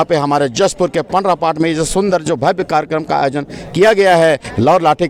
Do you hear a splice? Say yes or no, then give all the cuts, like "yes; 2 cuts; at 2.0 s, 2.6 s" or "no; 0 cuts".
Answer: no; 0 cuts